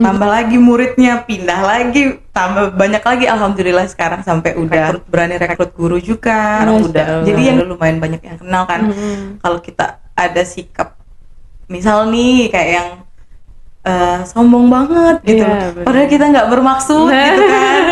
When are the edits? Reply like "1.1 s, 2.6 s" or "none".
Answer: 5.0 s, 7.6 s